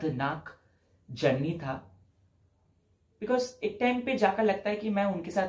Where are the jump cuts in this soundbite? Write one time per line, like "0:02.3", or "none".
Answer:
none